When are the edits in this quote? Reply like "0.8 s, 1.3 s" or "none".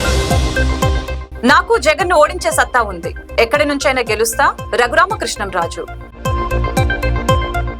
1.2 s